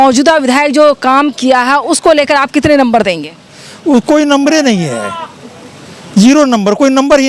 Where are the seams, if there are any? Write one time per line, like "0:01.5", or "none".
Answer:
none